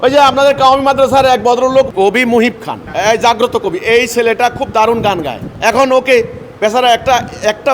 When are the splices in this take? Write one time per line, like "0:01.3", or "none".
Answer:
0:01.9